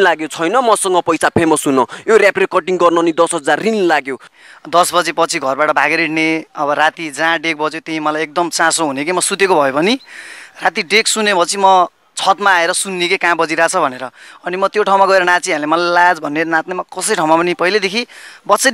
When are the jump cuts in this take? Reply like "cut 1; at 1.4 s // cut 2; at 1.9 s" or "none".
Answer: cut 1; at 4.3 s

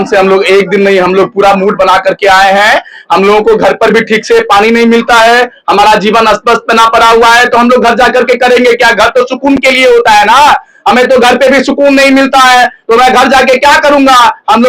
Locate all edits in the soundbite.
none

